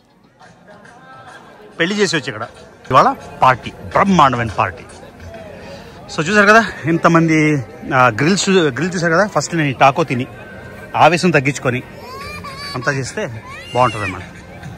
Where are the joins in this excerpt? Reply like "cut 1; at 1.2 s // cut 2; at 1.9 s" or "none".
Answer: cut 1; at 2.9 s

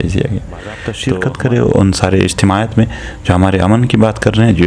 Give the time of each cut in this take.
cut 1; at 0.9 s

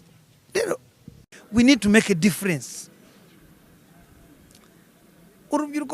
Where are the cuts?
cut 1; at 1.3 s

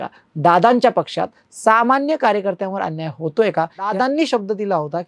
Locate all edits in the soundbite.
cut 1; at 3.9 s

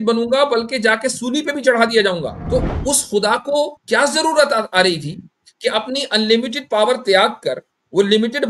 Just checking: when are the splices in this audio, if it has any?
cut 1; at 2.4 s // cut 2; at 3.8 s

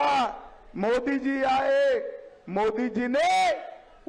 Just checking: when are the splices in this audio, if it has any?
none

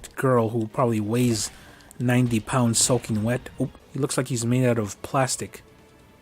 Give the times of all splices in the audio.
cut 1; at 3.8 s

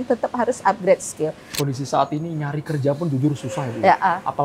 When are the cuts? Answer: cut 1; at 1.5 s

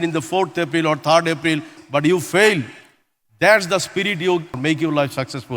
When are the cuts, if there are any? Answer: cut 1; at 1.8 s // cut 2; at 4.6 s

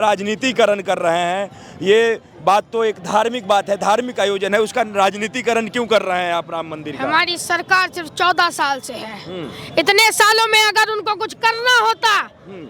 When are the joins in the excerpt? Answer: none

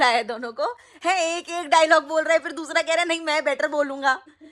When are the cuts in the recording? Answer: none

